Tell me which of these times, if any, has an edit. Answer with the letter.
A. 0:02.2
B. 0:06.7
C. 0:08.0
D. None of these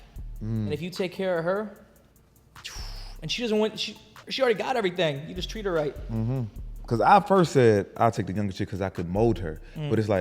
B